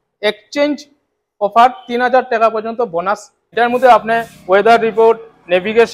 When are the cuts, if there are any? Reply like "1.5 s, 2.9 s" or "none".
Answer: 3.4 s